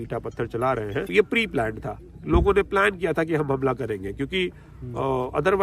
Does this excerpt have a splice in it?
yes; 1 cut; at 1.1 s

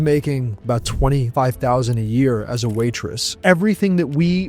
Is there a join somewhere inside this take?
yes; 2 cuts; at 1.0 s, 3.3 s

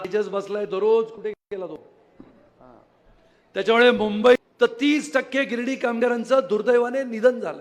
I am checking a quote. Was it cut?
yes; 1 cut; at 4.5 s

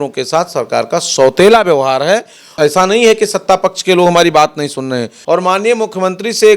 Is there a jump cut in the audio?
yes; 2 cuts; at 2.5 s, 5.1 s

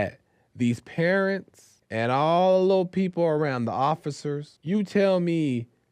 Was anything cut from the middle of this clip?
no; 0 cuts

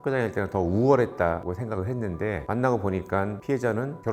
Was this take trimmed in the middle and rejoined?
no; 0 cuts

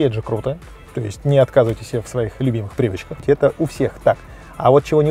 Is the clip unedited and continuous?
no; 1 cut; at 3.2 s

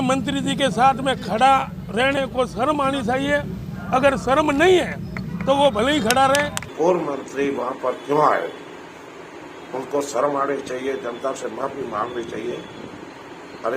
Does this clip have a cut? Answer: yes; 1 cut; at 6.7 s

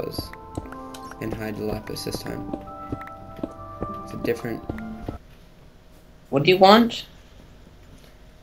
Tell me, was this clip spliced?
yes; 1 cut; at 5.2 s

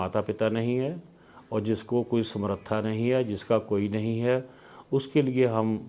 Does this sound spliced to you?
no; 0 cuts

